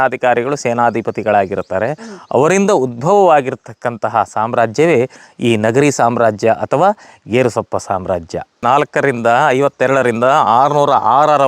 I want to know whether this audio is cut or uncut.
cut